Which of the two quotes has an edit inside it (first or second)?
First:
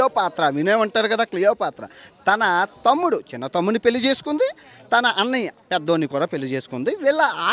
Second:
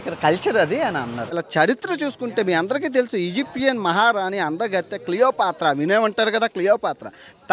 second